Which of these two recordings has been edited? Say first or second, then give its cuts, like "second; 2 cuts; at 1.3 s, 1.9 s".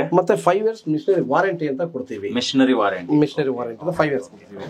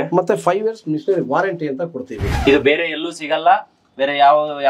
second; 1 cut; at 2.2 s